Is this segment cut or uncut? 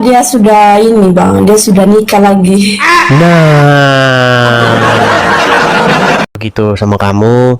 cut